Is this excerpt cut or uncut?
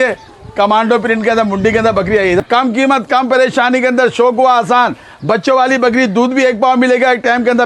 cut